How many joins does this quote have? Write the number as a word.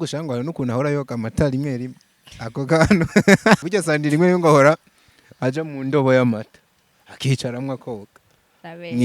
one